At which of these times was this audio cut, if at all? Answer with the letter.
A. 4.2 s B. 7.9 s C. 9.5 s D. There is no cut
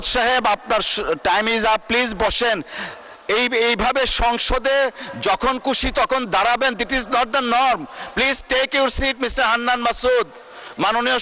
D